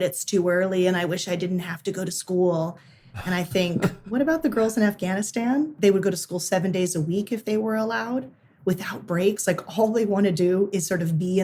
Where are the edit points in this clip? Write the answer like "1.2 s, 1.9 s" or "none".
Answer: 5.7 s